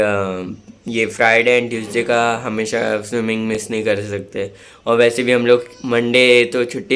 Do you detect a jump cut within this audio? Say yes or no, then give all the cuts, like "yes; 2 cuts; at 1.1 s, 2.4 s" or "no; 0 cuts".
no; 0 cuts